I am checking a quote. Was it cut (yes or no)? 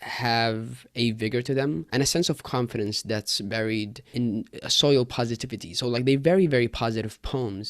yes